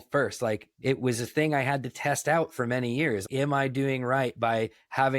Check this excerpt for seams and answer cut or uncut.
cut